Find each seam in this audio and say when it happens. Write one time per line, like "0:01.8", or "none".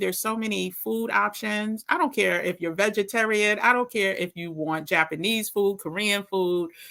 none